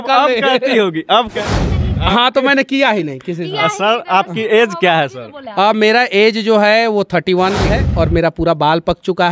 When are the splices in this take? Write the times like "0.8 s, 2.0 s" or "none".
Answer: 1.5 s, 7.7 s